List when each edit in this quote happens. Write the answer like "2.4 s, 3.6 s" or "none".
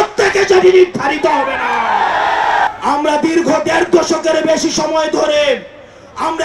2.7 s